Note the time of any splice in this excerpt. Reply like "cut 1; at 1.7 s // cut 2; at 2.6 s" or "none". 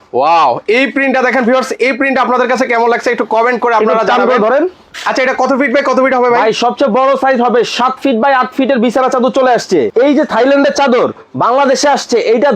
cut 1; at 9.9 s